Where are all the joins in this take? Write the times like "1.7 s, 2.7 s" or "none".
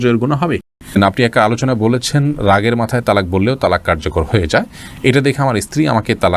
1.0 s